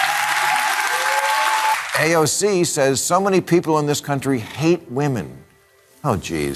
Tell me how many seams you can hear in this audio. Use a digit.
1